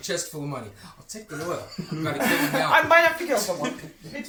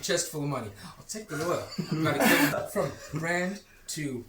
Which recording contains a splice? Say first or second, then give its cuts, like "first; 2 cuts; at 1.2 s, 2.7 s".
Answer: second; 1 cut; at 2.5 s